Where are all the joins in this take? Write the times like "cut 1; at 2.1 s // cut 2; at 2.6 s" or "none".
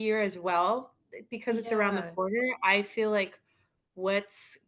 none

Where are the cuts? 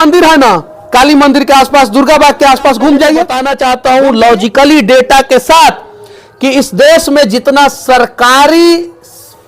cut 1; at 3.4 s

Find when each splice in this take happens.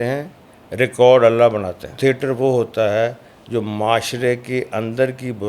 cut 1; at 2.0 s

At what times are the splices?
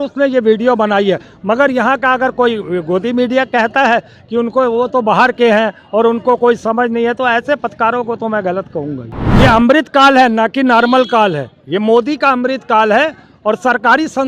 cut 1; at 9.1 s

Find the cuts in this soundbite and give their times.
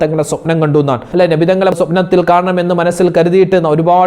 cut 1; at 1.0 s

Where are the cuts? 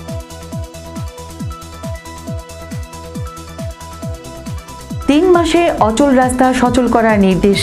cut 1; at 0.9 s

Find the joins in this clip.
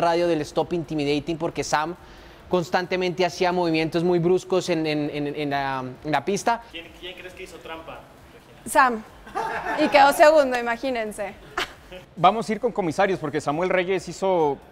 cut 1; at 6.8 s // cut 2; at 12.0 s

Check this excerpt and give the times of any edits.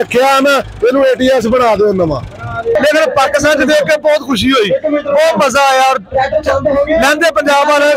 cut 1; at 2.7 s

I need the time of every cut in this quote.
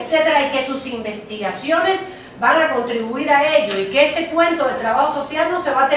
cut 1; at 1.2 s

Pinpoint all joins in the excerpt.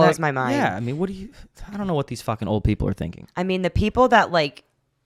none

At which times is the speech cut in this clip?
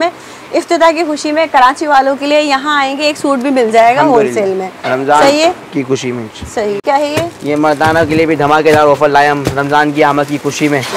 none

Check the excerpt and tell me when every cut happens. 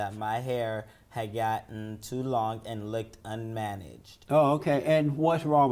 none

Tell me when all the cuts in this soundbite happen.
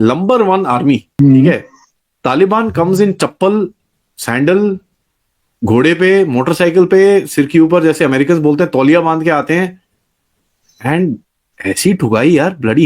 cut 1; at 1.1 s

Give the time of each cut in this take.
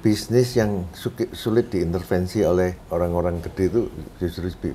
cut 1; at 2.8 s

